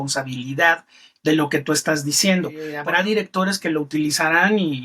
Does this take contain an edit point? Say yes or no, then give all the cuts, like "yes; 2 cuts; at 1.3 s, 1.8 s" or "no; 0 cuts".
yes; 1 cut; at 2.7 s